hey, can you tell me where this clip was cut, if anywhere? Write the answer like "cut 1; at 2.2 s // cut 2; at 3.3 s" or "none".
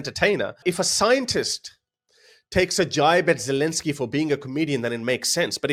none